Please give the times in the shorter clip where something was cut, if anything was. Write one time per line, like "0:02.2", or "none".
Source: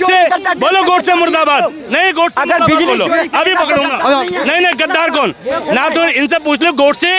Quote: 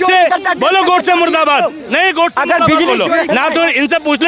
0:03.3